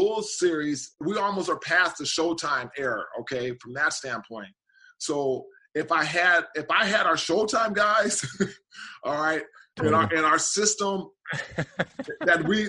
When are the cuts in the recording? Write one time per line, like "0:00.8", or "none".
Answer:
0:01.0